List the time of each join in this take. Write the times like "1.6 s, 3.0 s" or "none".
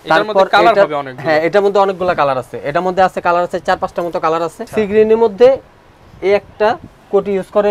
4.6 s